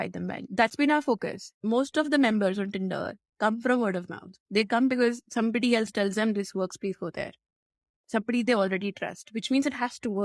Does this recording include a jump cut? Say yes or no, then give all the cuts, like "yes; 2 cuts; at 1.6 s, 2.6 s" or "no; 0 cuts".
no; 0 cuts